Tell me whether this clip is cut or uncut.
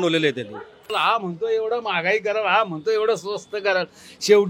cut